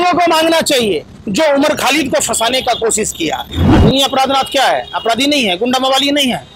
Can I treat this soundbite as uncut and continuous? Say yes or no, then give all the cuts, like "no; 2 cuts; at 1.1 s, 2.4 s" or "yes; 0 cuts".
no; 1 cut; at 3.6 s